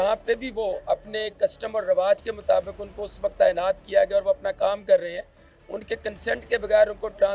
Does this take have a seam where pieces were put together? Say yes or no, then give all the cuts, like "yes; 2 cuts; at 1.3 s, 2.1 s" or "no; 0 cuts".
no; 0 cuts